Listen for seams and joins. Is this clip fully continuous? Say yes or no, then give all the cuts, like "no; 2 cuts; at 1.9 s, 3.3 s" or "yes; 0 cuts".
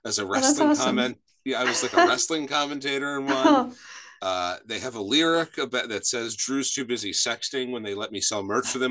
yes; 0 cuts